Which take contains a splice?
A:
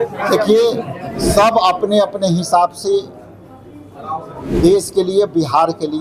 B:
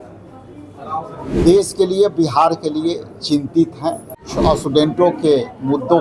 B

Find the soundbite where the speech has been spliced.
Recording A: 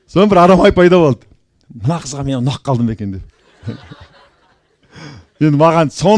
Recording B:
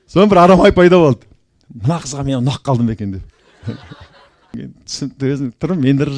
B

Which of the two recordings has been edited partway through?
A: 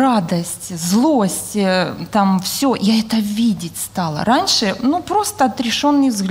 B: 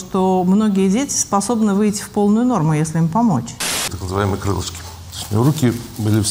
B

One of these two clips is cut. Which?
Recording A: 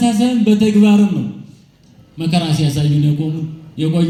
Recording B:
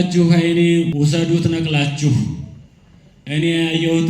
B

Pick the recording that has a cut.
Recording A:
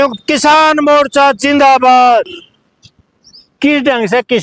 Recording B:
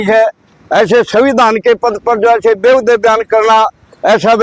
A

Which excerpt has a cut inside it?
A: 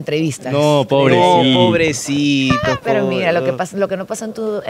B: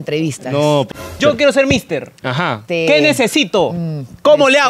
B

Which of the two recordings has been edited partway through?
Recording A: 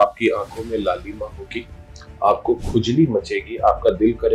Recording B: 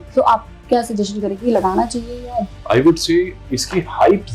B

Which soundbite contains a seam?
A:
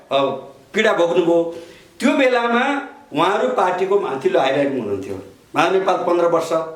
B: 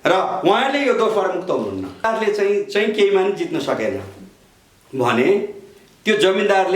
B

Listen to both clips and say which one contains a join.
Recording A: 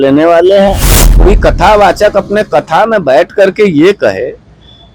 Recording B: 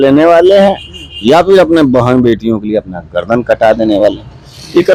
A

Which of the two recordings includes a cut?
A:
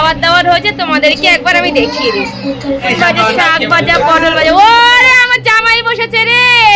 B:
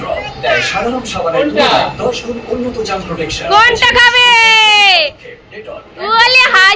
A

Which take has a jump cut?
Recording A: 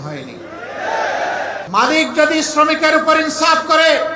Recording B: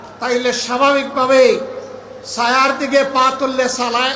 A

